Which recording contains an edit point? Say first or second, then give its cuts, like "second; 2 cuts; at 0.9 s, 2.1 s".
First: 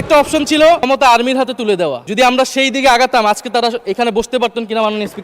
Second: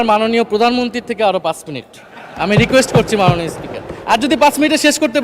first; 2 cuts; at 0.9 s, 2.0 s